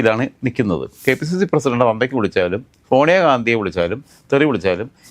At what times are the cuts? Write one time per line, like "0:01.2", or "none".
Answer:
0:01.0